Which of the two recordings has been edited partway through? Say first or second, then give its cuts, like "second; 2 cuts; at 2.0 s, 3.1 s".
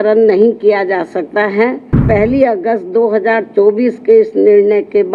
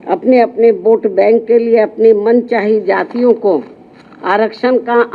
first; 1 cut; at 2.0 s